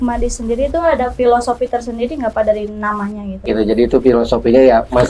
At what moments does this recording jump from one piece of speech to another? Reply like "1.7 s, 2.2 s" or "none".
3.4 s